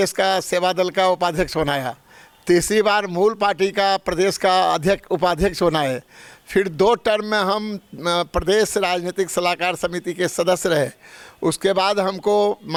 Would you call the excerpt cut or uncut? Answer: uncut